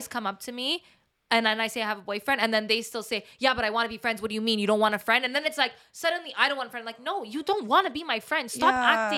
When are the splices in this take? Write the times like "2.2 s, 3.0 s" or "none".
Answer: none